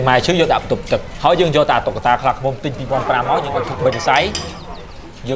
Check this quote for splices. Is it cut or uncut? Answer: uncut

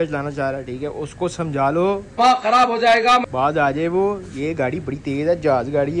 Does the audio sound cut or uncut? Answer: uncut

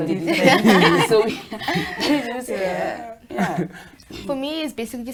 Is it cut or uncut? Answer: uncut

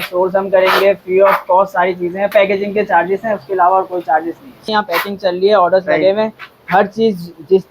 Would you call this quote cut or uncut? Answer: cut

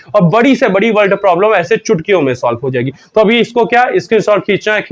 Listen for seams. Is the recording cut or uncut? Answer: uncut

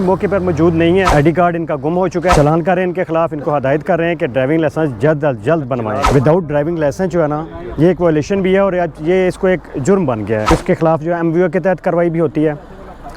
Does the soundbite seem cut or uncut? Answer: cut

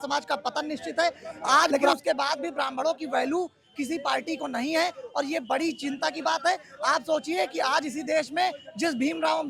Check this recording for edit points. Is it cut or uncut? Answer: cut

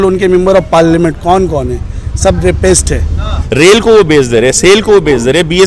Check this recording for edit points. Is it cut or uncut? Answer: cut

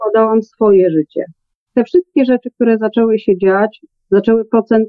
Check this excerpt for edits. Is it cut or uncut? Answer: cut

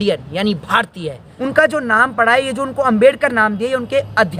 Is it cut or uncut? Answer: cut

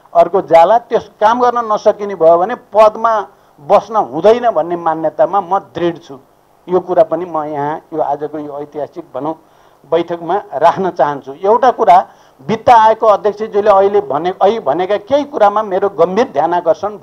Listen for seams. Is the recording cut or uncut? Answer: uncut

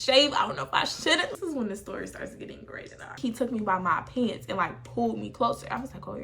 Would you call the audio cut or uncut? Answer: cut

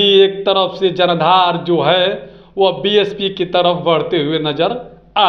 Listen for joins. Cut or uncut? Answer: uncut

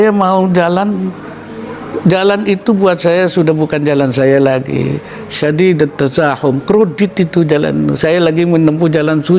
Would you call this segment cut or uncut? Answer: uncut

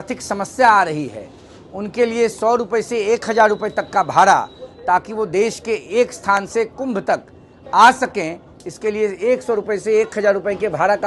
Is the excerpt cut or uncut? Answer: uncut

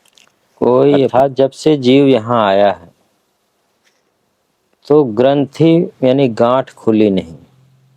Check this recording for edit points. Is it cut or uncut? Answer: cut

